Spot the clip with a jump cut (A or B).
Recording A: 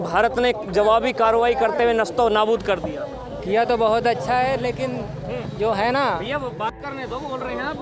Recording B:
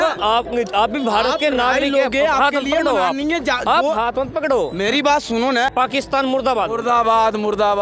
B